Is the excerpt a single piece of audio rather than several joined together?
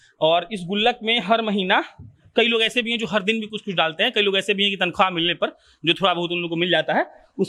yes; 0 cuts

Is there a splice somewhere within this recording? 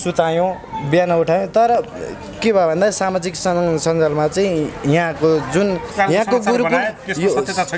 yes; 1 cut; at 5.9 s

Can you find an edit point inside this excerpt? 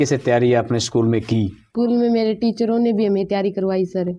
yes; 1 cut; at 1.6 s

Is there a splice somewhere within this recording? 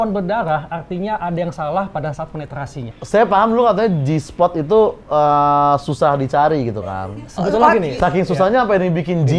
yes; 1 cut; at 2.9 s

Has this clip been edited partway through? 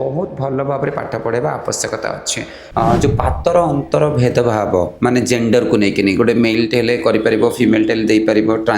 yes; 1 cut; at 2.5 s

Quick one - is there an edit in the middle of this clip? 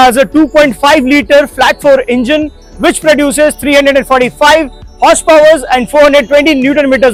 no; 0 cuts

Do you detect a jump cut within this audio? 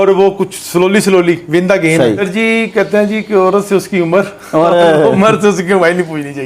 yes; 1 cut; at 2.2 s

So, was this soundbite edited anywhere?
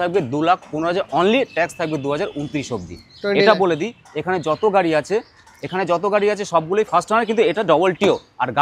no; 0 cuts

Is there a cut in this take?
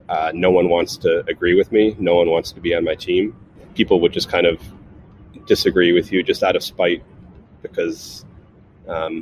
yes; 1 cut; at 3.6 s

